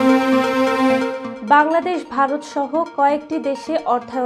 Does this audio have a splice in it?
yes; 1 cut; at 1.2 s

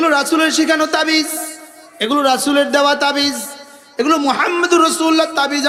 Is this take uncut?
yes; 0 cuts

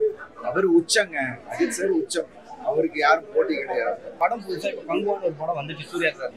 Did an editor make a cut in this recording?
yes; 1 cut; at 4.2 s

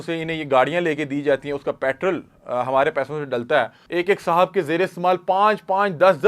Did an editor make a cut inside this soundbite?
yes; 1 cut; at 3.8 s

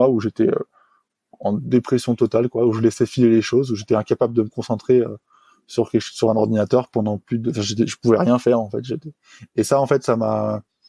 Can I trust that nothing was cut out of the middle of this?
yes; 0 cuts

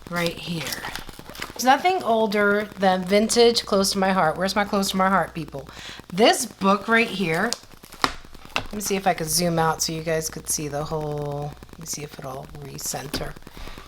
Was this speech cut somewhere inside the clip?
yes; 1 cut; at 1.6 s

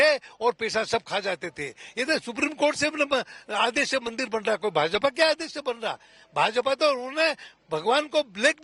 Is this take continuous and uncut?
yes; 0 cuts

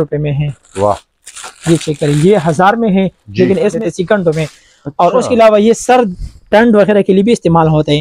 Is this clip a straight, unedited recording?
no; 1 cut; at 3.8 s

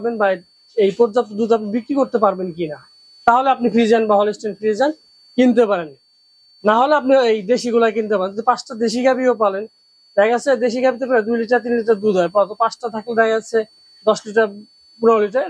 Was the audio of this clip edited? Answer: no; 0 cuts

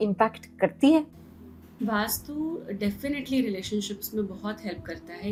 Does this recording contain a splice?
no; 0 cuts

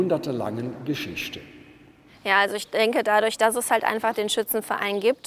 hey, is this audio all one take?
no; 1 cut; at 2.1 s

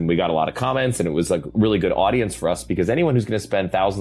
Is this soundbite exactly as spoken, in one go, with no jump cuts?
yes; 0 cuts

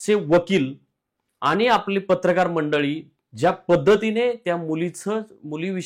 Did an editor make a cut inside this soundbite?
no; 0 cuts

